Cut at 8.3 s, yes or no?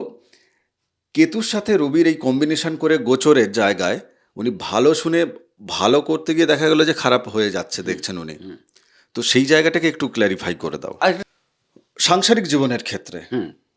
no